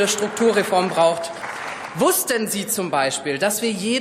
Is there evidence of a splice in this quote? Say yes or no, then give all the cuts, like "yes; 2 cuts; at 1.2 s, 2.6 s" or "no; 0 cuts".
yes; 1 cut; at 1.3 s